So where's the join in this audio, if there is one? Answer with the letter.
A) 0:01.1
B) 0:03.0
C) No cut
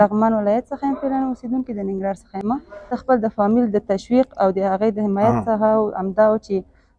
B